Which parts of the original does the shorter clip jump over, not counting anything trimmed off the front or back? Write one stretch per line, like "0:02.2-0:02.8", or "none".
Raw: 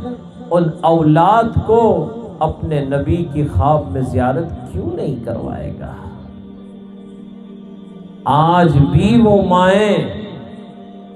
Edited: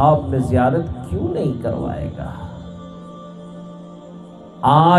none